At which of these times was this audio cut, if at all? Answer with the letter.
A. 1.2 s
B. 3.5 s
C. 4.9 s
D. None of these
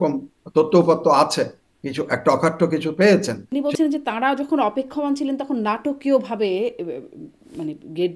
B